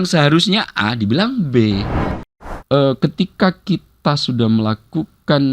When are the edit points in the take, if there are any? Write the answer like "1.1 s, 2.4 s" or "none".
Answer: 2.2 s